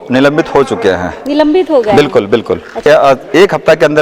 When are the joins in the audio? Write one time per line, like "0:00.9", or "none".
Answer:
0:02.8